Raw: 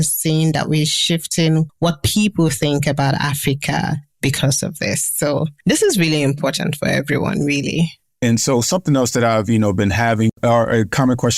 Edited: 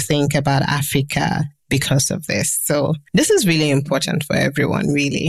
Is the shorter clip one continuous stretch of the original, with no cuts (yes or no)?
yes